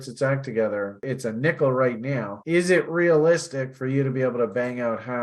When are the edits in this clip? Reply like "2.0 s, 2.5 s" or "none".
1.0 s